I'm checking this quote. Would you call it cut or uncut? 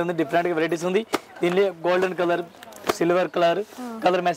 uncut